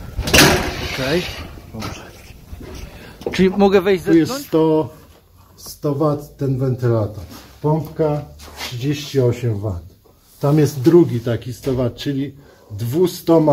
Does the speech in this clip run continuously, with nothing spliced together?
no; 1 cut; at 4.0 s

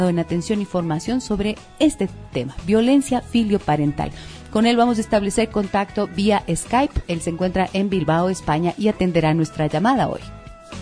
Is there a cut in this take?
yes; 1 cut; at 2.7 s

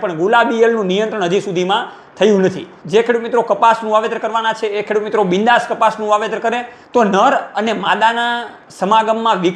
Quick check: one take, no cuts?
no; 2 cuts; at 2.7 s, 6.7 s

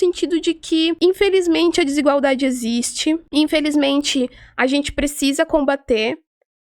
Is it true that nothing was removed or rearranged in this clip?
no; 2 cuts; at 1.0 s, 3.2 s

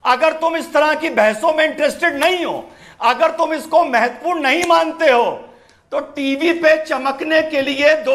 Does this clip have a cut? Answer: no; 0 cuts

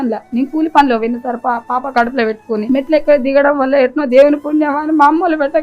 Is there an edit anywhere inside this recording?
yes; 1 cut; at 2.6 s

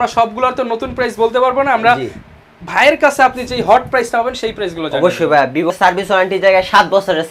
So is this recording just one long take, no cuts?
no; 1 cut; at 5.7 s

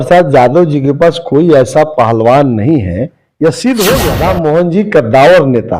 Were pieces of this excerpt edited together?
yes; 1 cut; at 4.1 s

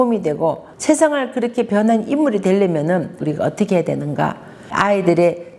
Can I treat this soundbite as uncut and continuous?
no; 1 cut; at 3.2 s

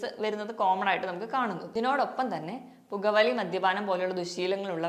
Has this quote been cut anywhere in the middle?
yes; 1 cut; at 1.6 s

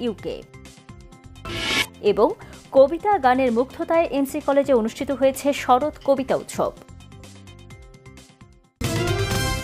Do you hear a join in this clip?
yes; 1 cut; at 8.7 s

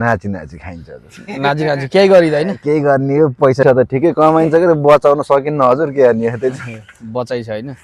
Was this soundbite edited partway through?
yes; 1 cut; at 3.6 s

